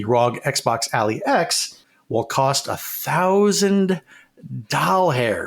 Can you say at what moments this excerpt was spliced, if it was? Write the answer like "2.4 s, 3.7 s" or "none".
1.8 s